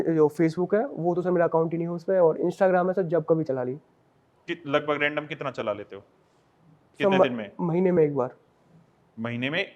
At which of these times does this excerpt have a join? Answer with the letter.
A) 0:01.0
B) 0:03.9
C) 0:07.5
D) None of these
D